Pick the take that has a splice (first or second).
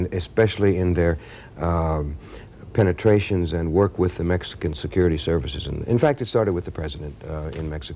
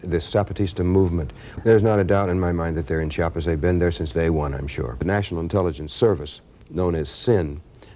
second